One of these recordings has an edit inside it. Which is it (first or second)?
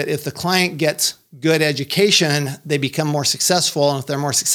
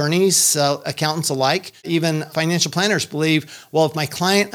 second